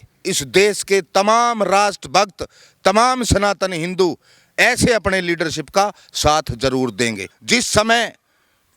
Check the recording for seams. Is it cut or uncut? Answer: cut